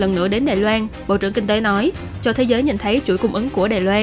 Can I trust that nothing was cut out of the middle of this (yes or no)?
no